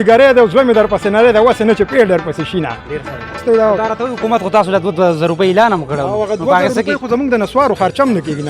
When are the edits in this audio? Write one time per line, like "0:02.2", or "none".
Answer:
0:03.4